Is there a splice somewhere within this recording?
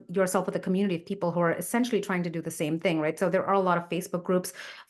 no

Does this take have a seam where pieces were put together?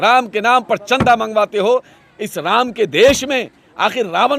yes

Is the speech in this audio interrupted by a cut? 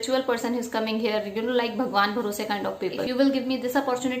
yes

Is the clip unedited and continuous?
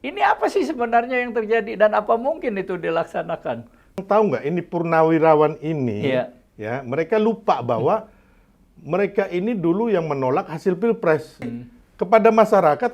no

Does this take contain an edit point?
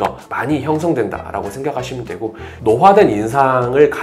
yes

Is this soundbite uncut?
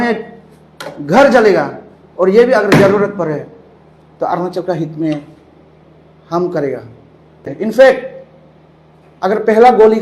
no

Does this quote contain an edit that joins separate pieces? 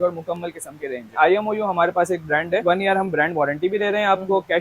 yes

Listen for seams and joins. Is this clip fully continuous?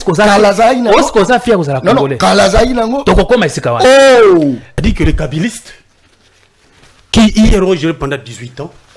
no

